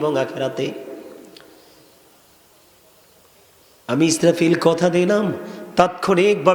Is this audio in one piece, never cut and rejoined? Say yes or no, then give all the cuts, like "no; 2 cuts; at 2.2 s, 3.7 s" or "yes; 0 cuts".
yes; 0 cuts